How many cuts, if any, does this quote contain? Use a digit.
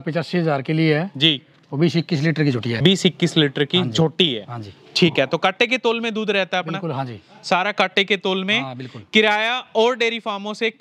1